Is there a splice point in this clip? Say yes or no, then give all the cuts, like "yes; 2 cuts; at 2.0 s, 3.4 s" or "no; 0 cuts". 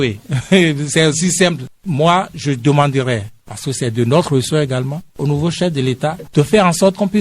yes; 1 cut; at 1.7 s